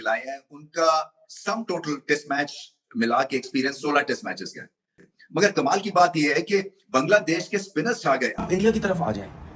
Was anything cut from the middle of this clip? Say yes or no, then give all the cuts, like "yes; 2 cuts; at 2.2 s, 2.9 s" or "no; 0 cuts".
yes; 1 cut; at 8.3 s